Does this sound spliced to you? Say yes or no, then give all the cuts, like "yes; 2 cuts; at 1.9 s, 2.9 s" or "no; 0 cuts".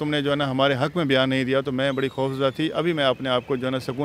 no; 0 cuts